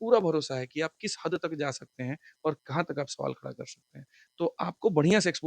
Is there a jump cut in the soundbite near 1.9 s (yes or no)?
no